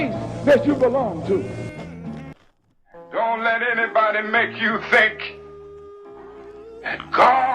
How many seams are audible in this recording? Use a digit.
1